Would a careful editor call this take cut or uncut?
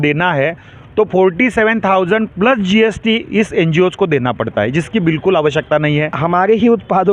cut